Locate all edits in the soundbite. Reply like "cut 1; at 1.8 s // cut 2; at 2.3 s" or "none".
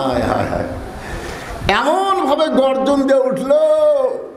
none